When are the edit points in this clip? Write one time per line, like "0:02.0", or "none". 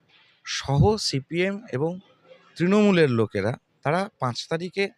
0:03.7